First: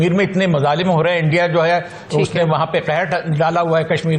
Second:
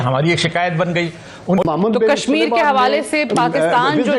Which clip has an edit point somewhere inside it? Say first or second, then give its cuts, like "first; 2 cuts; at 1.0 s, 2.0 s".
second; 1 cut; at 1.7 s